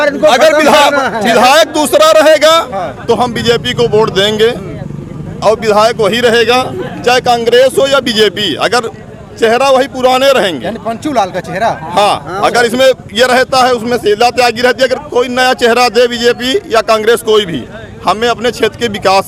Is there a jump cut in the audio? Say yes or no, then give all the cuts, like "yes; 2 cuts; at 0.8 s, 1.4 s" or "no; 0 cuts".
no; 0 cuts